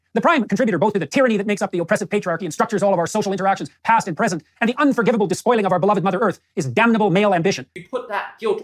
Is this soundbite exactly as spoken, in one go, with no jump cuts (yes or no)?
no